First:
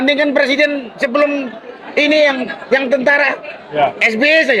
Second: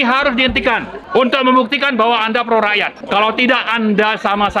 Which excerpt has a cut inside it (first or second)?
second